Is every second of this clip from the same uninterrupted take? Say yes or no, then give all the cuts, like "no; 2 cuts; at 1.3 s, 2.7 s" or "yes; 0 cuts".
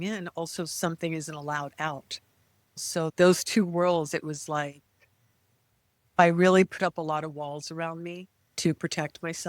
no; 2 cuts; at 2.8 s, 6.2 s